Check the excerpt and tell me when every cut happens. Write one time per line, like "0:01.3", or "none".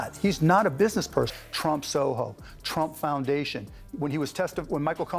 0:01.4